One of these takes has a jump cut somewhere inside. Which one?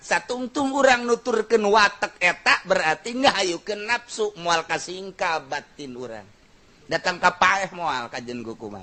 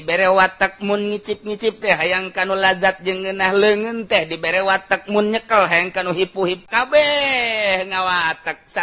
second; 1 cut; at 6.6 s

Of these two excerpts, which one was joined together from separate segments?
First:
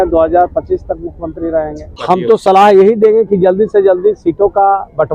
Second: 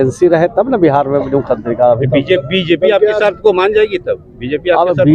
first; 1 cut; at 2.0 s

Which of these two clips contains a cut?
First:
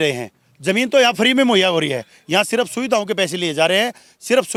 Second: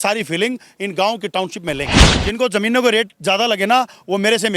second; 1 cut; at 2.2 s

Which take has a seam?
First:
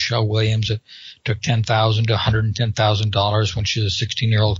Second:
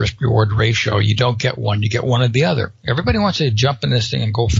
second; 1 cut; at 2.8 s

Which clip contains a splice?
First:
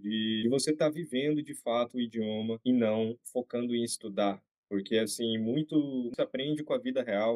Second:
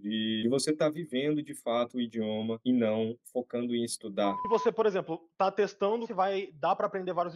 second; 2 cuts; at 4.4 s, 6.1 s

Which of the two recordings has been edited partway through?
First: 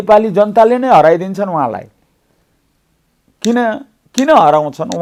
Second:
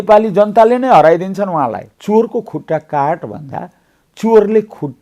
second; 1 cut; at 1.9 s

